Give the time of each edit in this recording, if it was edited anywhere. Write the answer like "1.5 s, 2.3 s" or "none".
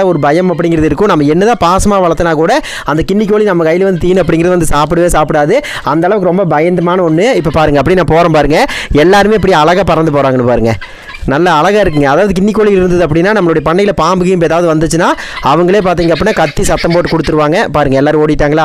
none